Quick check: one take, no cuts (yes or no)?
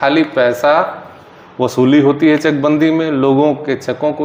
yes